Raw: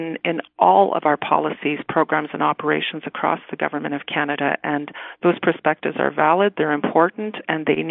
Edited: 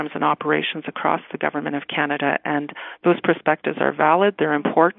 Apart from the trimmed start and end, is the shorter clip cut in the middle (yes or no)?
no